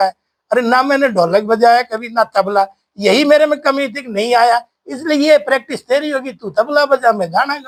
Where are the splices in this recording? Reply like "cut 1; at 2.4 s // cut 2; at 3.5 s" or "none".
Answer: none